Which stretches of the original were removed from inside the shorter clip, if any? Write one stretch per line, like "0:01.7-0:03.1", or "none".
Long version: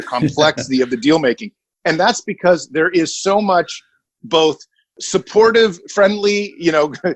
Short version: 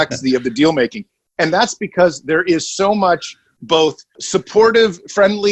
0:04.3-0:04.6